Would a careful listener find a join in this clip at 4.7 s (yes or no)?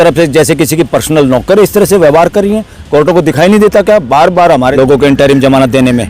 yes